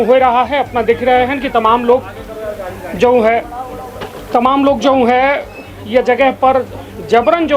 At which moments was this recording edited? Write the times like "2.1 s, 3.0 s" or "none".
none